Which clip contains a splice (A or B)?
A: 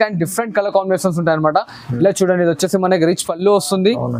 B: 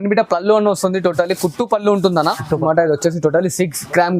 B